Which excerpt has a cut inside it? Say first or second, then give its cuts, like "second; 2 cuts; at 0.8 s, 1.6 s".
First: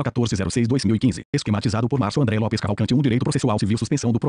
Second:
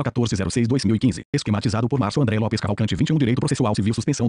first; 1 cut; at 3.0 s